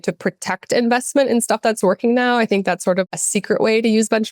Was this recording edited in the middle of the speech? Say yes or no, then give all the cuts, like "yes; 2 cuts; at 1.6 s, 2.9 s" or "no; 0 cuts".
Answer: yes; 1 cut; at 3.0 s